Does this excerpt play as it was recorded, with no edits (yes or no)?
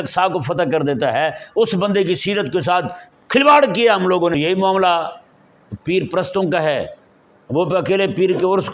no